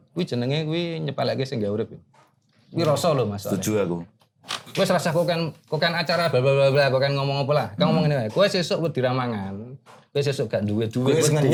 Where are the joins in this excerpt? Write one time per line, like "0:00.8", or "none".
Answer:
none